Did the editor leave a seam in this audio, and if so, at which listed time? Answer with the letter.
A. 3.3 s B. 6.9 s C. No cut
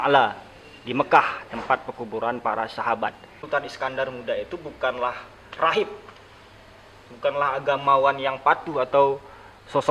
A